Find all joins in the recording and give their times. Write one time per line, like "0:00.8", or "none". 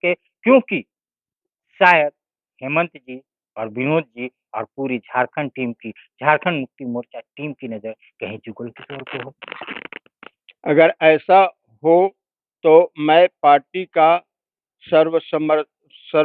none